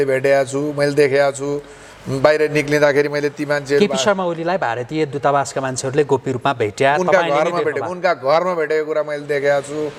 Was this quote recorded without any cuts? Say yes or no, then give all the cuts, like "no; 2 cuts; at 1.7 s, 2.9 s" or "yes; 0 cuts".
yes; 0 cuts